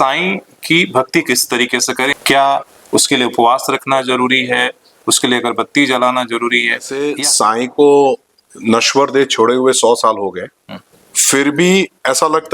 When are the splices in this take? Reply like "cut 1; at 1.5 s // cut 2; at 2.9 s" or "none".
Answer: cut 1; at 2.2 s // cut 2; at 7.0 s